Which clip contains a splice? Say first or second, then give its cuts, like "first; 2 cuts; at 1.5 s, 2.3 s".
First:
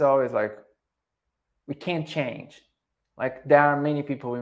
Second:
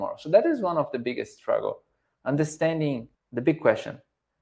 second; 1 cut; at 3.2 s